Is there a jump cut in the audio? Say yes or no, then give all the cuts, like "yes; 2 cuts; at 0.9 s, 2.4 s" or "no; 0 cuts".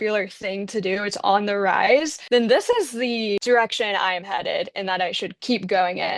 yes; 1 cut; at 2.2 s